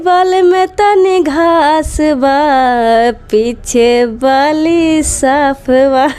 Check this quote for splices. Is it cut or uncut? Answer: uncut